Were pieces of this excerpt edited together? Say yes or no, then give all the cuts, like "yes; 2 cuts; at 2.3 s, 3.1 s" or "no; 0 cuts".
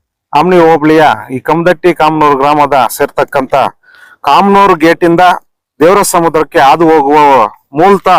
no; 0 cuts